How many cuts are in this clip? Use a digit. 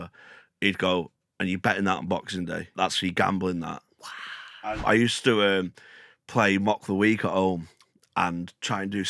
2